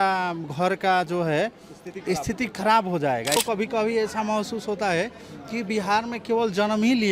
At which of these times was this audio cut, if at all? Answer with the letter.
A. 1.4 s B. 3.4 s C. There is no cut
B